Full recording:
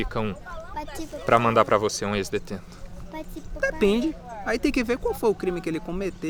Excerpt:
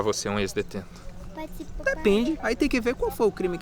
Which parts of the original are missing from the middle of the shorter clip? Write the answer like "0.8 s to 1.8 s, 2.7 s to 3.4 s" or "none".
4.2 s to 4.4 s